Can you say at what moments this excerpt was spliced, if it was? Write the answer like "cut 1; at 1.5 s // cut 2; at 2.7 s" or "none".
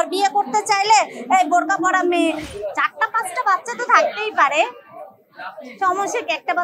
cut 1; at 2.5 s